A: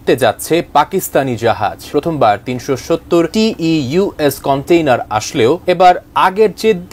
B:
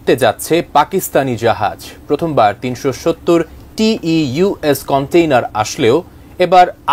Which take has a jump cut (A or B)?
A